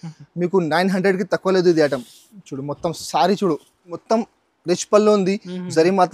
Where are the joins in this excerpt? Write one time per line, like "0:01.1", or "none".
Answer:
0:04.0